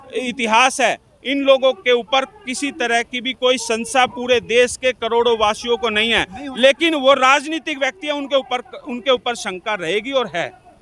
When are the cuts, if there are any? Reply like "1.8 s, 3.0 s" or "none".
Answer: none